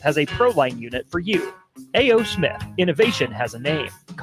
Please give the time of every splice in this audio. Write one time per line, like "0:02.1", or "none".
none